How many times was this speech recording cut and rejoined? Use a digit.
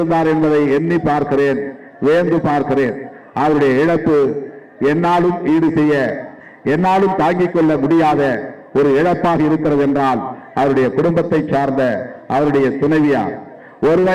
0